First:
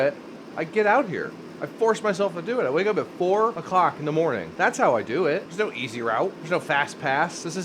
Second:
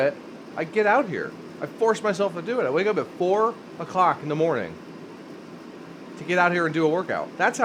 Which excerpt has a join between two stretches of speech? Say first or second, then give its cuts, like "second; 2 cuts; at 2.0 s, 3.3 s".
first; 4 cuts; at 3.6 s, 4.5 s, 5.5 s, 6.4 s